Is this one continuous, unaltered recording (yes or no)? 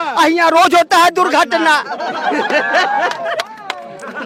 yes